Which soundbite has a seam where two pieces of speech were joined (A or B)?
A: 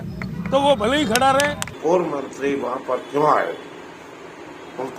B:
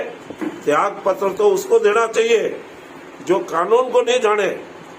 A